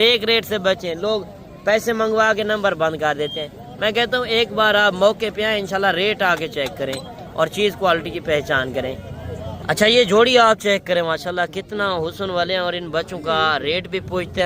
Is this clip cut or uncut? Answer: uncut